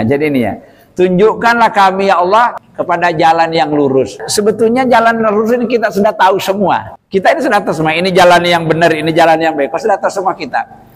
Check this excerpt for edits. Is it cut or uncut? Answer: cut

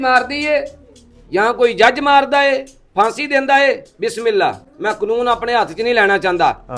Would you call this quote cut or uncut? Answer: uncut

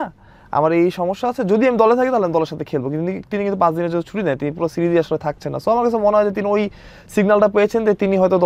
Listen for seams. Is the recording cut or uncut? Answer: uncut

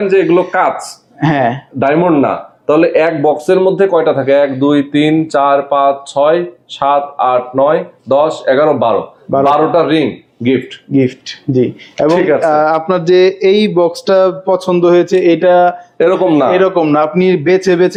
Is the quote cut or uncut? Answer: uncut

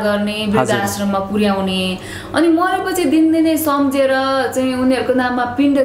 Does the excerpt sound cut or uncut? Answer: uncut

